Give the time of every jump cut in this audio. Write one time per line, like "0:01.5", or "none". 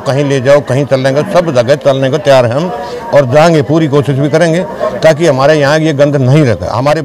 none